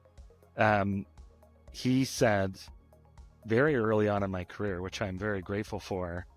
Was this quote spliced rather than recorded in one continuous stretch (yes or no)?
no